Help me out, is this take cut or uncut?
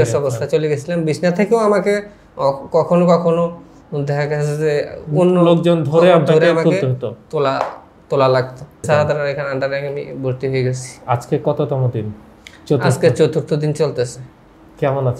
cut